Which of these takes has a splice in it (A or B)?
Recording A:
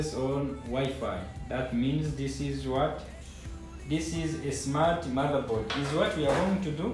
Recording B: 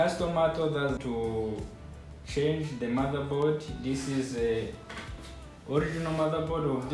B